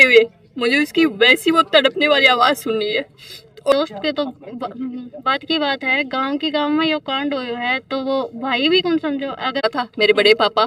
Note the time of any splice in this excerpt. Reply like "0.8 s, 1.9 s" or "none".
3.7 s, 9.6 s